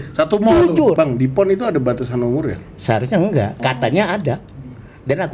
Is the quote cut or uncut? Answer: cut